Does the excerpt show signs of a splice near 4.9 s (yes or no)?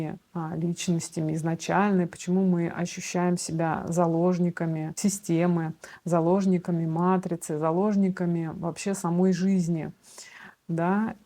yes